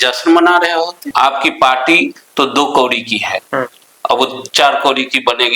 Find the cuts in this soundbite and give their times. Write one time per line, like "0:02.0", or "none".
0:01.0